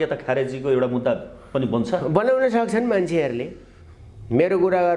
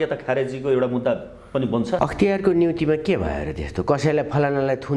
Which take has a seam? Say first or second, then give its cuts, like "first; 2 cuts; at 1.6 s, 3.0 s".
second; 1 cut; at 2.0 s